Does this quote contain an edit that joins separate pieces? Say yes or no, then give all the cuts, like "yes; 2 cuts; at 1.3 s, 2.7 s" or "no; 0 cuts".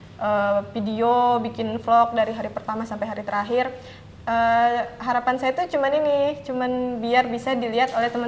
no; 0 cuts